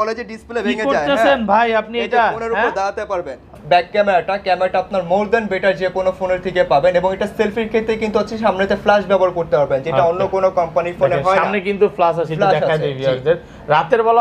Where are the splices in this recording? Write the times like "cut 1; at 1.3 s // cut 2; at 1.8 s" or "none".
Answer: cut 1; at 3.6 s

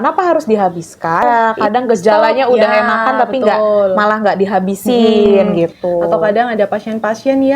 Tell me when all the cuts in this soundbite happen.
cut 1; at 1.2 s

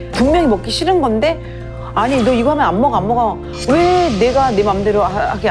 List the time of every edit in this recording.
none

